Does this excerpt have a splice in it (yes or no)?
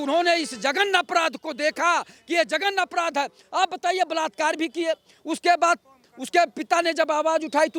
no